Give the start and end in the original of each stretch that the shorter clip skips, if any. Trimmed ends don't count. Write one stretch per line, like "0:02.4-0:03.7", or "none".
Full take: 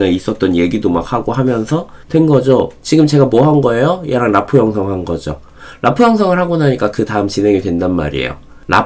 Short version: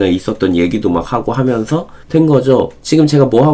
none